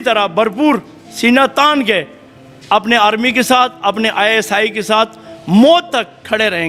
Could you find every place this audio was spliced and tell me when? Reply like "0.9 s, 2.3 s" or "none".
none